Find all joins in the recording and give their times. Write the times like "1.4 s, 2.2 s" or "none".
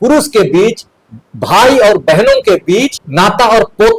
3.0 s